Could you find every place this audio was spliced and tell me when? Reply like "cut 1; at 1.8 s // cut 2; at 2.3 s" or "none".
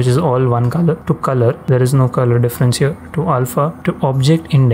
cut 1; at 1.4 s // cut 2; at 3.8 s